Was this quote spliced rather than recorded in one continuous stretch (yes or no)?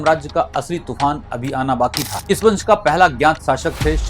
yes